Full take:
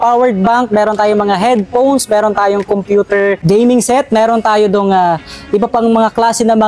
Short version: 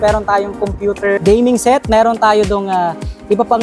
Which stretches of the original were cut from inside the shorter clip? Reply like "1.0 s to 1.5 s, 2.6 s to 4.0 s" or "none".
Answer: 3.3 s to 3.4 s